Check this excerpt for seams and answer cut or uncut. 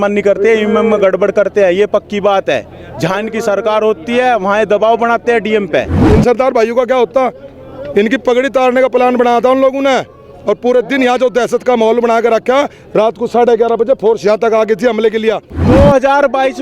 cut